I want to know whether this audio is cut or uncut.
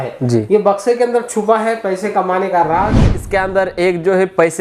cut